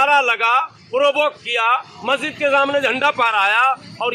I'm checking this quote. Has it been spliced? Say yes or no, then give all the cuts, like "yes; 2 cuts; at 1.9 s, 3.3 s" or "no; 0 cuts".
no; 0 cuts